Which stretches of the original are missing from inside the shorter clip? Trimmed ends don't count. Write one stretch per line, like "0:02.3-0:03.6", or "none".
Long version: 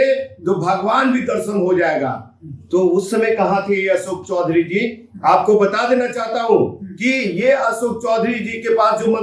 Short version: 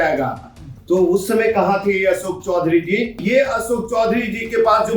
0:05.0-0:07.3